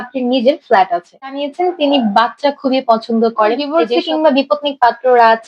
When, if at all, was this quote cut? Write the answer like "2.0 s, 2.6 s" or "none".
1.4 s, 3.7 s